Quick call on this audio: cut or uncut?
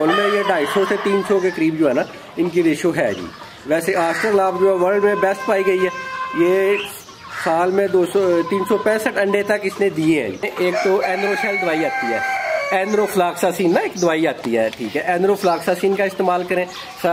cut